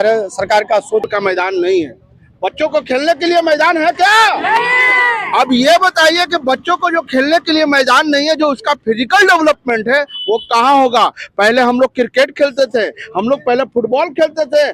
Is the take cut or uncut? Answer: cut